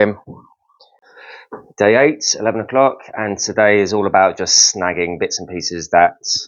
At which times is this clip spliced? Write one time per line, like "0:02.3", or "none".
0:01.1

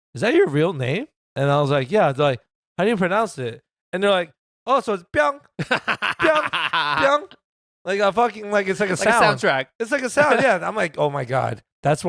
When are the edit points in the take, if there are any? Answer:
none

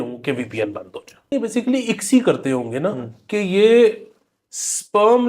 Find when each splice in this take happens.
0:01.3

